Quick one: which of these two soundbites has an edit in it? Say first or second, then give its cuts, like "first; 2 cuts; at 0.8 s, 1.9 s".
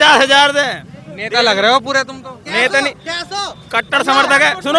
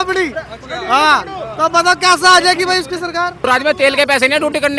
second; 1 cut; at 3.3 s